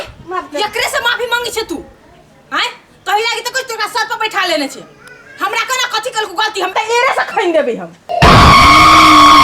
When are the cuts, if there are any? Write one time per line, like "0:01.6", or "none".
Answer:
0:08.1